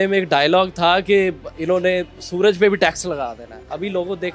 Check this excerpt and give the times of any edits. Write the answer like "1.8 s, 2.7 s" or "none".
none